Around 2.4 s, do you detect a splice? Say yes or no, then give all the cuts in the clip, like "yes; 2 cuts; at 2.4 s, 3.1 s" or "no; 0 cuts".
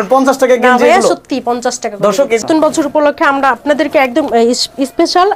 yes; 1 cut; at 2.4 s